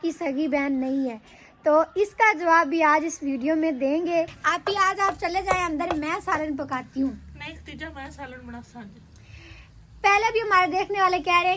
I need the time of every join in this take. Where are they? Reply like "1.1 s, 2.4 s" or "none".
4.4 s